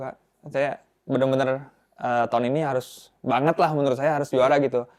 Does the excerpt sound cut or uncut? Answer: uncut